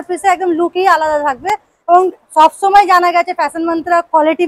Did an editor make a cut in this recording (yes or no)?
no